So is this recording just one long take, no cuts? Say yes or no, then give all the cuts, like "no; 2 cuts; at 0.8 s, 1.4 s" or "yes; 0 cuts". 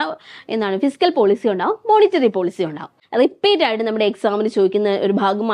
no; 1 cut; at 3.0 s